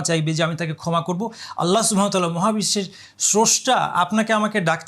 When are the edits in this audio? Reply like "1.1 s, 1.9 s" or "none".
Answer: none